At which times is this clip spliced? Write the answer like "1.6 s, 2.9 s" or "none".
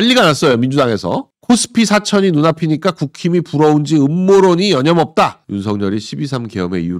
5.4 s